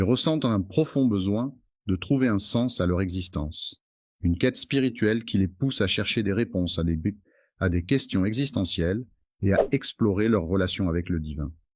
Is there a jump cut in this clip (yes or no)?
no